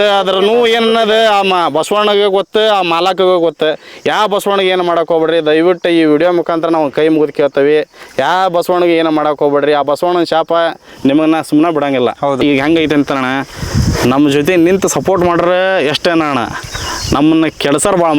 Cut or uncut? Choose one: cut